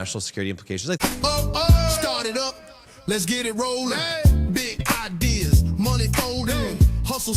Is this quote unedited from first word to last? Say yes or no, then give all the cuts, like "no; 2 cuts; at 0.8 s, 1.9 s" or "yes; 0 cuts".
no; 1 cut; at 1.0 s